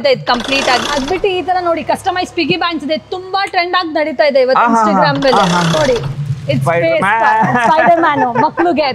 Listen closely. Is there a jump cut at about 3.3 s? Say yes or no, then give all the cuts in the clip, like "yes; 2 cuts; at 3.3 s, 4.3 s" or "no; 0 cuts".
no; 2 cuts; at 0.9 s, 5.8 s